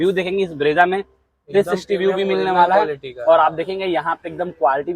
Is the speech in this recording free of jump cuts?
yes; 0 cuts

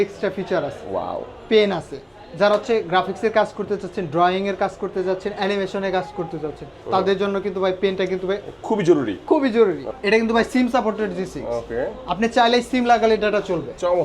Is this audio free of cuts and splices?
no; 1 cut; at 9.9 s

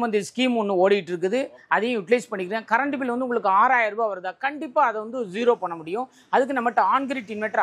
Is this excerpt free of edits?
yes; 0 cuts

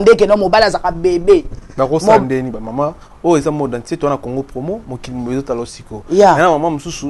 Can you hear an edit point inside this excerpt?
no; 0 cuts

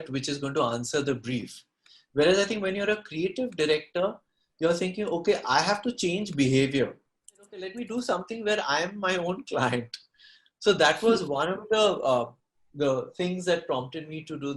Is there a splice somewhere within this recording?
yes; 1 cut; at 7.7 s

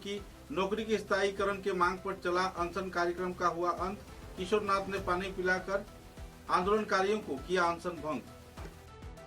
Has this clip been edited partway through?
yes; 1 cut; at 8.2 s

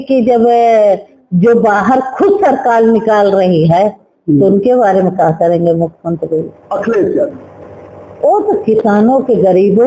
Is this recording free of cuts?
no; 1 cut; at 6.6 s

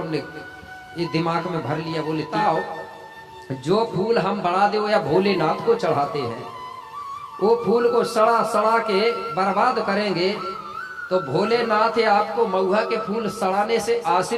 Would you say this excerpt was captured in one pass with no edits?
no; 1 cut; at 2.3 s

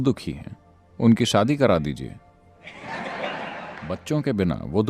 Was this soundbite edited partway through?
yes; 1 cut; at 3.8 s

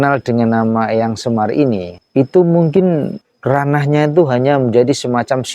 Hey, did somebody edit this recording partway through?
yes; 2 cuts; at 2.0 s, 3.2 s

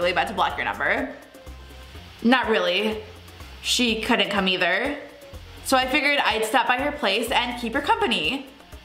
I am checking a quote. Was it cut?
no; 0 cuts

